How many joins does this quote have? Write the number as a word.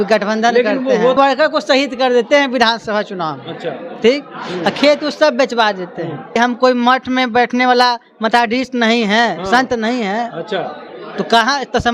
two